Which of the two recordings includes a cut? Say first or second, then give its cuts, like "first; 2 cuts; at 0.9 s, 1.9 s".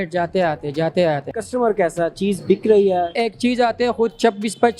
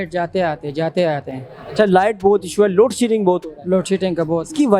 first; 2 cuts; at 1.4 s, 3.1 s